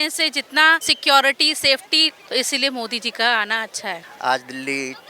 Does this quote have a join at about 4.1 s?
yes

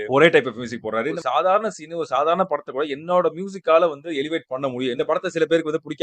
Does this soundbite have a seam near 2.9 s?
no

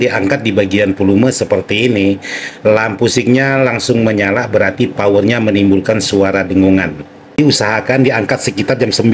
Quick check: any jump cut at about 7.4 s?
yes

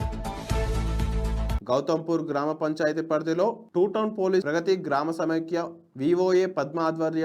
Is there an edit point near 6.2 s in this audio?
no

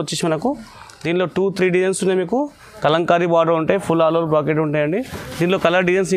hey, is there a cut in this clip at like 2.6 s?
yes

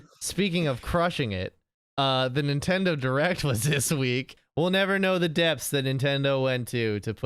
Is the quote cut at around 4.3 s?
yes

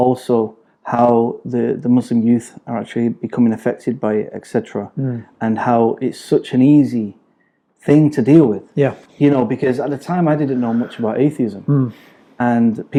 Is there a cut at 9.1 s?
no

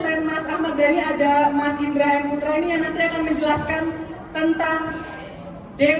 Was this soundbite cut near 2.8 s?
no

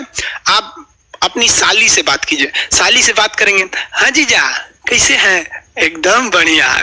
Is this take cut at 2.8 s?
no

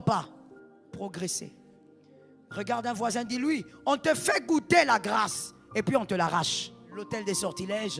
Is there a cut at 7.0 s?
yes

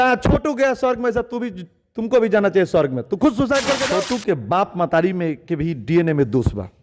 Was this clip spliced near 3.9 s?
yes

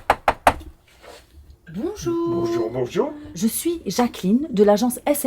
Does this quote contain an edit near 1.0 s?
no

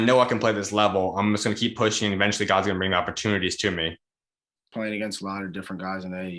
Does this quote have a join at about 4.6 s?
yes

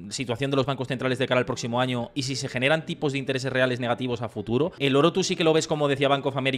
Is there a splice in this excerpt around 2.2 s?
no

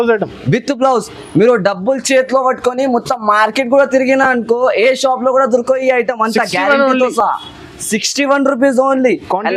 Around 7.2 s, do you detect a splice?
no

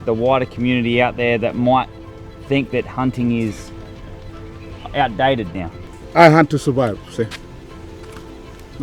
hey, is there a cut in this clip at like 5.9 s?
yes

